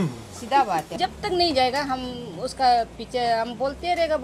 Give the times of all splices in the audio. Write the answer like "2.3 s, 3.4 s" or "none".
0.9 s